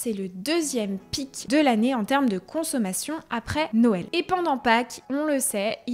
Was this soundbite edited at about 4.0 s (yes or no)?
yes